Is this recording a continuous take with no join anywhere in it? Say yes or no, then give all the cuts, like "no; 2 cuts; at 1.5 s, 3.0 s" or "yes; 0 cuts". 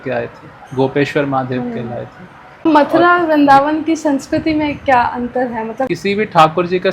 no; 2 cuts; at 2.6 s, 5.8 s